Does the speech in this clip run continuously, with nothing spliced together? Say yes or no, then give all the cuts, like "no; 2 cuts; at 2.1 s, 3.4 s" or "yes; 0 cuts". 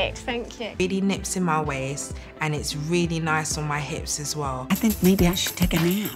no; 1 cut; at 4.6 s